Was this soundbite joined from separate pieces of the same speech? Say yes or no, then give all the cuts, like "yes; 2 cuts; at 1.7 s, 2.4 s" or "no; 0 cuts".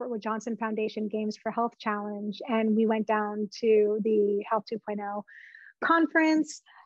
no; 0 cuts